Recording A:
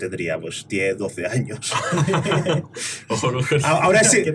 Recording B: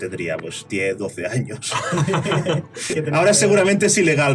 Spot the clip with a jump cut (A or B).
B